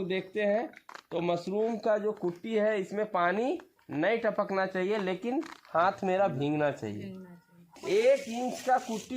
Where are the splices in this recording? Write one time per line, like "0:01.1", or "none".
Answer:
0:07.7